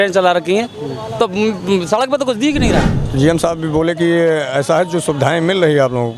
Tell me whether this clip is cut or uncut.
cut